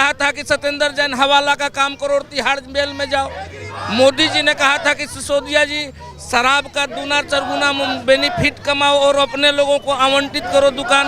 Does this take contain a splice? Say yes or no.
no